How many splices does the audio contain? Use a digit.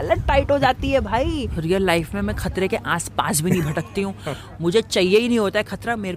1